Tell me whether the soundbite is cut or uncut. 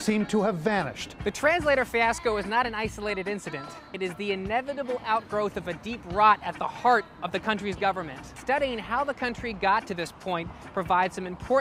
uncut